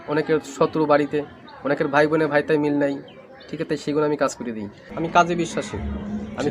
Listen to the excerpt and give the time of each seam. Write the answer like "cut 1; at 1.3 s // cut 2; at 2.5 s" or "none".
cut 1; at 4.9 s